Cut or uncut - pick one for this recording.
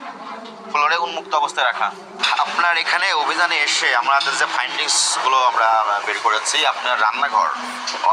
cut